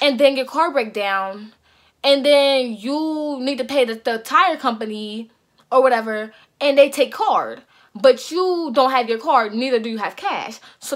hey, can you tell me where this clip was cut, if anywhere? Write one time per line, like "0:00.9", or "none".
none